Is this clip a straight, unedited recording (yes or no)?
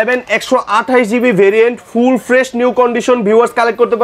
yes